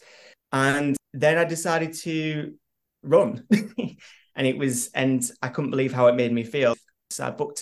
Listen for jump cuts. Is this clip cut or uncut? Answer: cut